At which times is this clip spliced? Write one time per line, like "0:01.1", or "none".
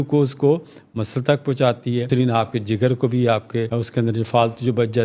0:02.1
0:03.8